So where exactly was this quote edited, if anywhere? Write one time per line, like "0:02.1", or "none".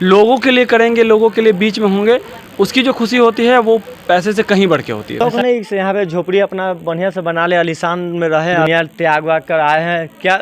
0:05.2
0:08.7